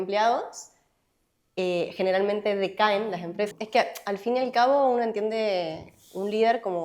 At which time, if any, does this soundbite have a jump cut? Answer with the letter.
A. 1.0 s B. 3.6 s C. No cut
B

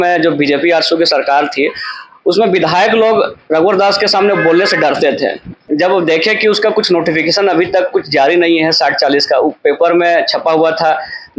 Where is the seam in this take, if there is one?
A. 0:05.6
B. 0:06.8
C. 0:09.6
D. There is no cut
A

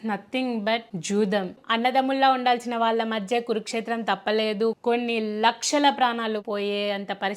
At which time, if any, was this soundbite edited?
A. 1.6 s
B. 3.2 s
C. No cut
A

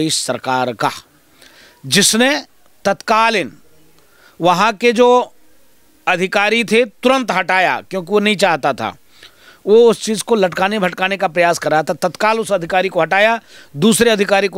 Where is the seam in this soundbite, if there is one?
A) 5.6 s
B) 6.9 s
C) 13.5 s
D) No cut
D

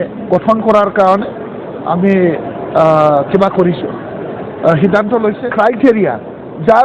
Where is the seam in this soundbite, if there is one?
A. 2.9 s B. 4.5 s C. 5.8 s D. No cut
C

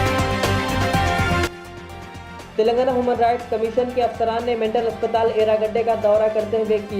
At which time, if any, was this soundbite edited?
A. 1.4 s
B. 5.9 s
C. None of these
C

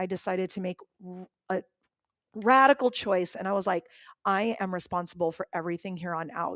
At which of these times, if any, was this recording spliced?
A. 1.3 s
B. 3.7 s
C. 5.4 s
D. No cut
D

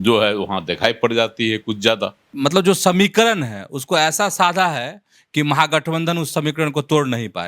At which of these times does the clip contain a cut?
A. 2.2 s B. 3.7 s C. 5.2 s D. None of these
A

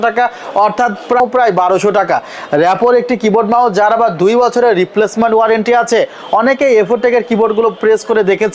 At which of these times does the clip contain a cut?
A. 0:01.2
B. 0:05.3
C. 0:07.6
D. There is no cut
A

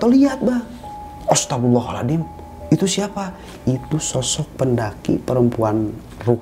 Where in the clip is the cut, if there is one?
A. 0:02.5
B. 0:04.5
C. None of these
C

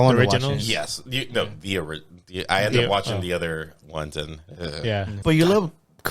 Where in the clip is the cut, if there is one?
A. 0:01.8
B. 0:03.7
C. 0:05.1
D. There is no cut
C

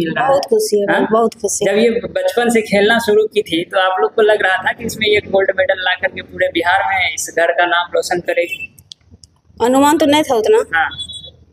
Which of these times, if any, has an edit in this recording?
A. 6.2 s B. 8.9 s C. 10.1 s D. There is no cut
D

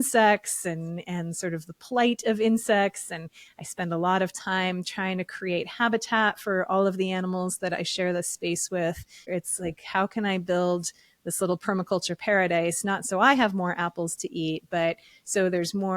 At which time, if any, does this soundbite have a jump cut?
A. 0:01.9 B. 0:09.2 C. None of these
B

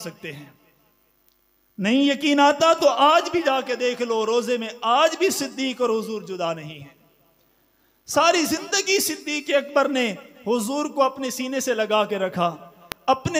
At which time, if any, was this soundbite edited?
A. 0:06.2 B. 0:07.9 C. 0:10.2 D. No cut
D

